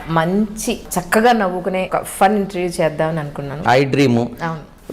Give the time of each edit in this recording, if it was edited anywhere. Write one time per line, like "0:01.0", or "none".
0:00.9
0:01.9
0:03.6